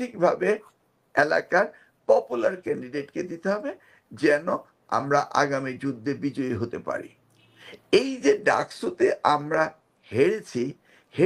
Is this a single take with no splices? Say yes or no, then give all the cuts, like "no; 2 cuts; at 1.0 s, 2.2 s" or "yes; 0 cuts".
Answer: yes; 0 cuts